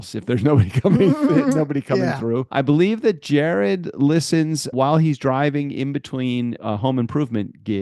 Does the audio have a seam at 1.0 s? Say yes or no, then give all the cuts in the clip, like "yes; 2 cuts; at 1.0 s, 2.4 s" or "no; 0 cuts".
no; 3 cuts; at 2.5 s, 4.7 s, 6.6 s